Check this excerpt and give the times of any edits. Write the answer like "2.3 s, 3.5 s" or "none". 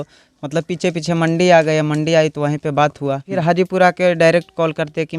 3.3 s